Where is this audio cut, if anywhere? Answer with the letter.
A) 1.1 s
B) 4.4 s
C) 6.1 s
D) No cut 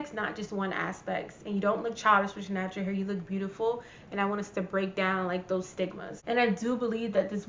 C